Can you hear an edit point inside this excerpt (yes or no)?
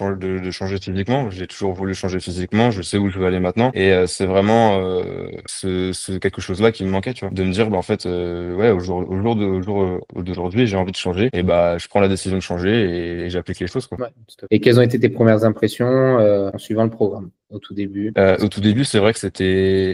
no